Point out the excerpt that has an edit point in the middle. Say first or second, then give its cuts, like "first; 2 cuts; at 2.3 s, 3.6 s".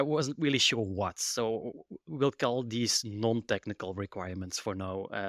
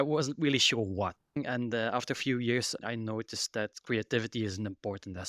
second; 1 cut; at 1.4 s